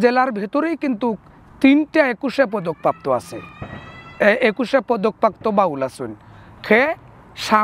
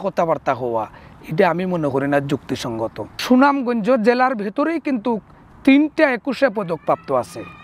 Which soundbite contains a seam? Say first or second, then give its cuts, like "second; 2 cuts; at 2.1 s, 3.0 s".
second; 1 cut; at 3.1 s